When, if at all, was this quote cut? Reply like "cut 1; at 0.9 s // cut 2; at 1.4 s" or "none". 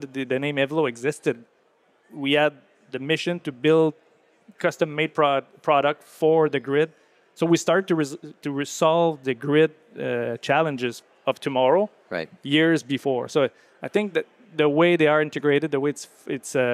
none